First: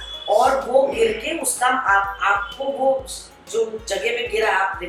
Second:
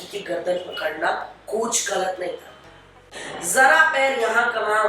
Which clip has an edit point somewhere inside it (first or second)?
second